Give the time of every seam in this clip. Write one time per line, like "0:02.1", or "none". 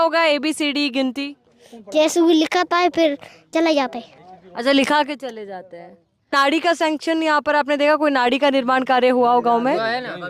0:06.3